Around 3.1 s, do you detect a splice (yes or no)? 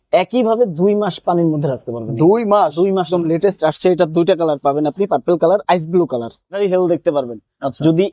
yes